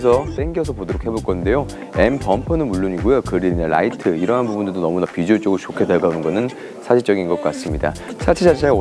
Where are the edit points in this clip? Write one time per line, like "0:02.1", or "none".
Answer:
none